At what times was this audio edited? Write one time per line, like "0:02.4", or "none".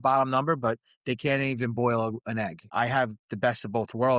0:02.6

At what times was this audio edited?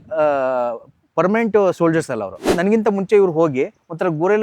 0:02.5

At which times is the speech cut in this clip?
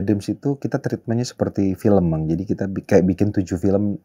none

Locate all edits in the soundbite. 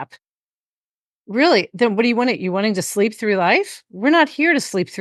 none

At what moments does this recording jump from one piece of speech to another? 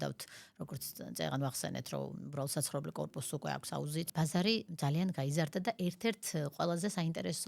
0:04.1

